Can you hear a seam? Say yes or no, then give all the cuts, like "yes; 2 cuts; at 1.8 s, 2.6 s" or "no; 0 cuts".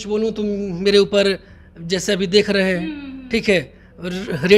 no; 0 cuts